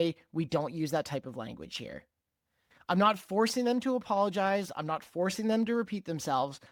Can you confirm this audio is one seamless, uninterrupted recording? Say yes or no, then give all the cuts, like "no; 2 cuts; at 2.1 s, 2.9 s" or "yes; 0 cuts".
yes; 0 cuts